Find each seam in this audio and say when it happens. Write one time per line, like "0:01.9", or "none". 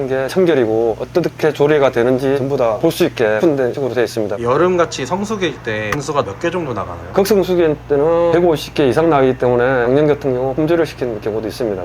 0:00.9
0:02.4
0:04.3